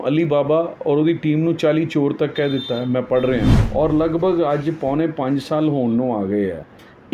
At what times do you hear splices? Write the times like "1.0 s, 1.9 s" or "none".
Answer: 3.6 s